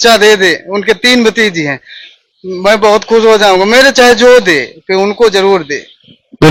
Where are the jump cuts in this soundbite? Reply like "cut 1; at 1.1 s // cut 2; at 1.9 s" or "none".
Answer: none